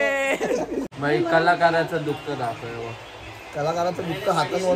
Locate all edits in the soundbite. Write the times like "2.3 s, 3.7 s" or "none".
0.9 s